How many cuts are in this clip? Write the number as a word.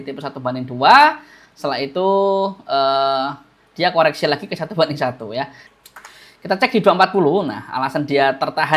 one